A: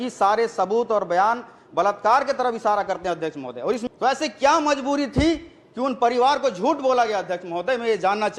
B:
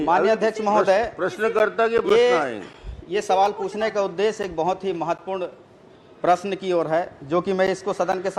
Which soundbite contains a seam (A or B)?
A